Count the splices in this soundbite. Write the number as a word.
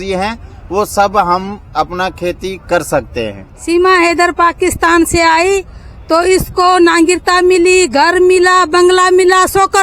one